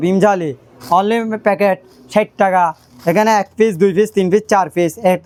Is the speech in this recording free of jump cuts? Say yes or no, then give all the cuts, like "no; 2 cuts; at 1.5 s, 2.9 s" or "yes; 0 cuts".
yes; 0 cuts